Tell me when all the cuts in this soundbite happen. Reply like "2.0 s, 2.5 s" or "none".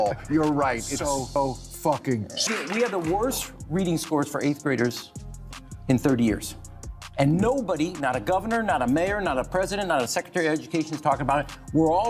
2.3 s